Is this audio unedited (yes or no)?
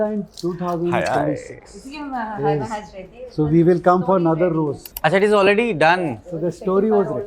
no